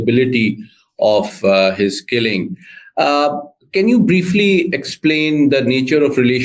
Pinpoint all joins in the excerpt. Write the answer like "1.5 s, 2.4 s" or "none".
none